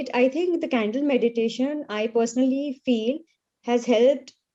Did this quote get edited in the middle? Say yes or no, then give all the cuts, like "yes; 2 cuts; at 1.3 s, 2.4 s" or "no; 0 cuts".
no; 0 cuts